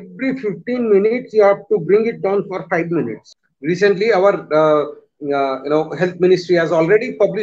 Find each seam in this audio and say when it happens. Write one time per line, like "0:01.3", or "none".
0:03.3